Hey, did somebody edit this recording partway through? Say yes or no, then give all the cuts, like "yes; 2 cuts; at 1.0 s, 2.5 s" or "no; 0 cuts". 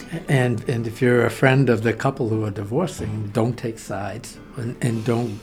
no; 0 cuts